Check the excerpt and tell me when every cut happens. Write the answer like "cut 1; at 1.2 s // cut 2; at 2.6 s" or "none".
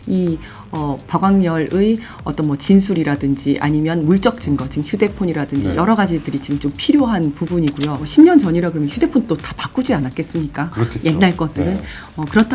cut 1; at 8.1 s